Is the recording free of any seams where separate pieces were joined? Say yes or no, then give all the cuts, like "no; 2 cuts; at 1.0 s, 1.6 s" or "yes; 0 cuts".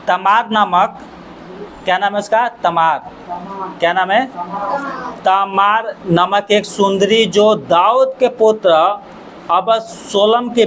yes; 0 cuts